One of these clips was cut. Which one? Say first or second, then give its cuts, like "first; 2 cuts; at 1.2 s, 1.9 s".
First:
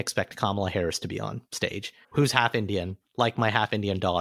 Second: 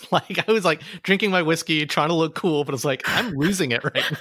first; 1 cut; at 1.5 s